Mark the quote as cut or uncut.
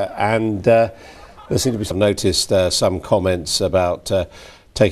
uncut